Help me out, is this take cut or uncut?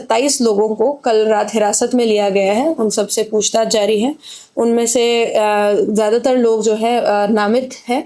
uncut